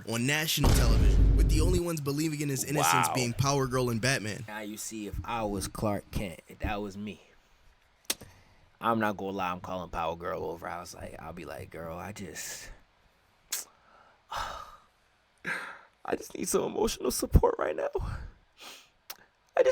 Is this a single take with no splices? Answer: no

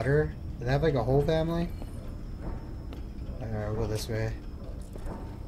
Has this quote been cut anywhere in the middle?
no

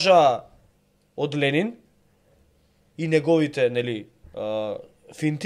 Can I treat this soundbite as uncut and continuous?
yes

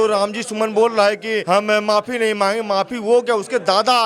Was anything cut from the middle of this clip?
yes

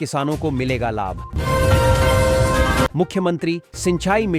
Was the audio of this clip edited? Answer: yes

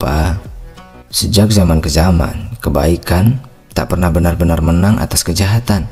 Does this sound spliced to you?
no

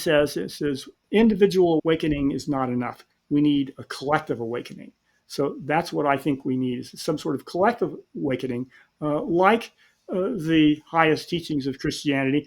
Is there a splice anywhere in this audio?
yes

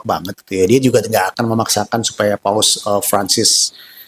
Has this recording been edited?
no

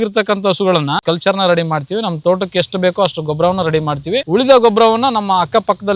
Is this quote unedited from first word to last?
no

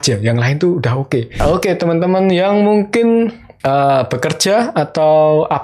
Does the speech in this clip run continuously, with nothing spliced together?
no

